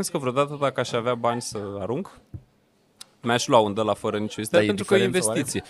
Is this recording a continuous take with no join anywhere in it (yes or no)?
yes